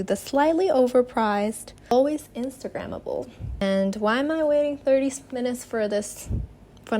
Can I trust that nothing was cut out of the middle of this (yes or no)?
no